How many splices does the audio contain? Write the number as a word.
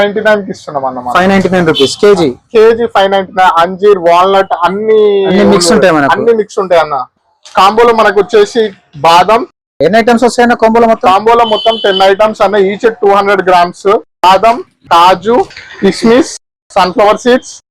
one